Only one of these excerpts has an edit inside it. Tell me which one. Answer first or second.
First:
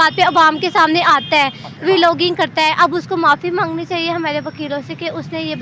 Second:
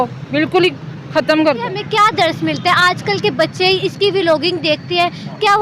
second